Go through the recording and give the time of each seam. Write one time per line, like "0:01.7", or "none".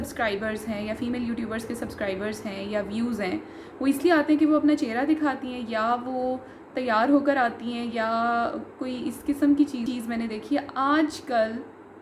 0:09.9